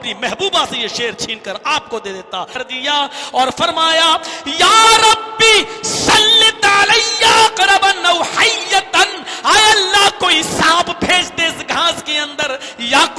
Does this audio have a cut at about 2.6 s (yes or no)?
yes